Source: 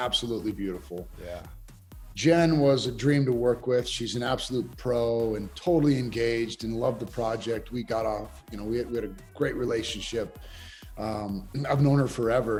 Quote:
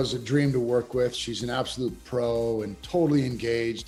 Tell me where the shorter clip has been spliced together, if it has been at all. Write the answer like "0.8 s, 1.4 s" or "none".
none